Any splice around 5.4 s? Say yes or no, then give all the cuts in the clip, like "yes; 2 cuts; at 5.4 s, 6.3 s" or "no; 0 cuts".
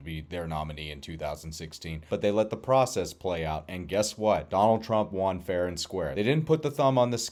no; 0 cuts